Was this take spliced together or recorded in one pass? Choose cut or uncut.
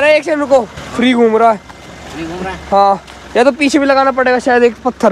uncut